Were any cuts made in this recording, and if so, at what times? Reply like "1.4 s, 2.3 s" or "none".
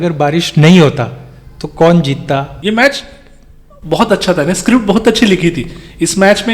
2.5 s